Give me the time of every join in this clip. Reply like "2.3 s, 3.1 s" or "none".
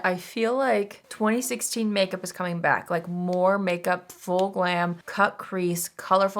1.0 s, 5.0 s